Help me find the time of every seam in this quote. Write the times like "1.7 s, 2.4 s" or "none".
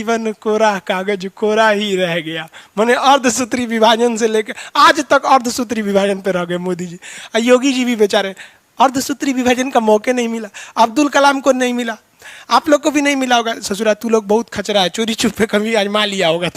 none